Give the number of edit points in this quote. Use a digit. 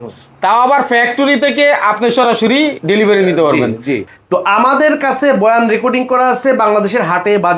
1